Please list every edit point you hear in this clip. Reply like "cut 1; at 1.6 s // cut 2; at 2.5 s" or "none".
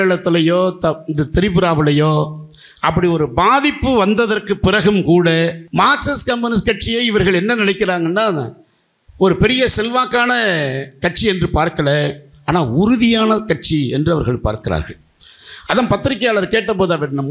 cut 1; at 5.6 s